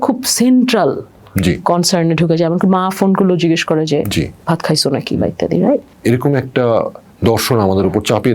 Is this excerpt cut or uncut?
cut